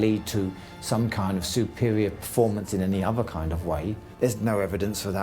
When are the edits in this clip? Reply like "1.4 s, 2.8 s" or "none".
4.0 s